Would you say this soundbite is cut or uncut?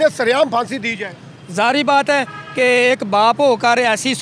uncut